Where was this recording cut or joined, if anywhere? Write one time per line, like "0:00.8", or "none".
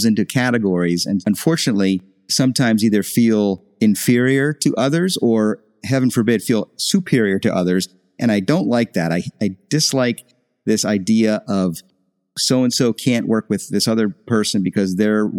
0:01.2
0:02.2
0:03.6